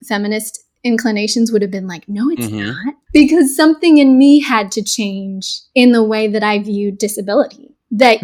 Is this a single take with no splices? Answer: no; 1 cut; at 2.9 s

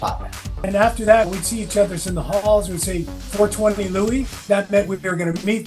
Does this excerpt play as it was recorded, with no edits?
no; 2 cuts; at 0.7 s, 1.3 s

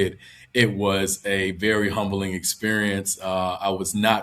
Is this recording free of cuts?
yes; 0 cuts

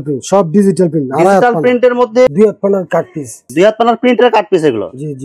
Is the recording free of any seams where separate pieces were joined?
no; 1 cut; at 2.3 s

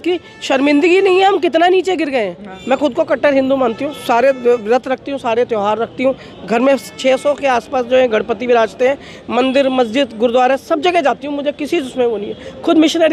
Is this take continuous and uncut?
no; 1 cut; at 2.5 s

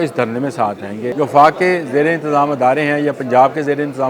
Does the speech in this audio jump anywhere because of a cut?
yes; 1 cut; at 1.0 s

